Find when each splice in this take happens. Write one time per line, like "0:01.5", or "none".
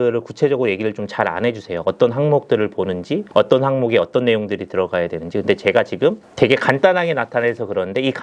0:03.2
0:06.2